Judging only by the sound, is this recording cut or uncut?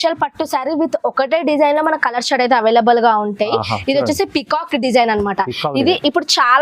uncut